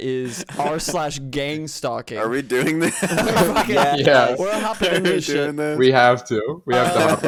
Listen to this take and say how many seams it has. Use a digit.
0